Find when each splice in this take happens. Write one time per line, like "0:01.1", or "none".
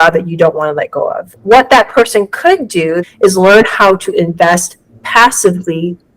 0:01.2
0:03.0